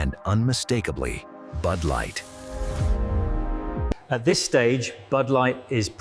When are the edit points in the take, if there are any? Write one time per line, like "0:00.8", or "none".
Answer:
0:04.0